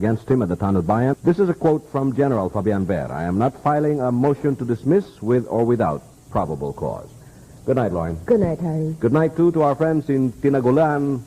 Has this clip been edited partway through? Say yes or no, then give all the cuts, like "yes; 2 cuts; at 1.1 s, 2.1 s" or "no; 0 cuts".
yes; 1 cut; at 1.1 s